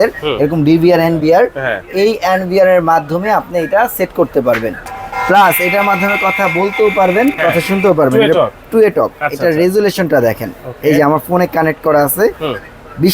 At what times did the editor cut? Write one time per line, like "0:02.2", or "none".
0:04.8